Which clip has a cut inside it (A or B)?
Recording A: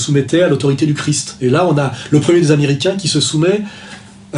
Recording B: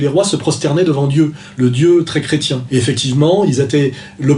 B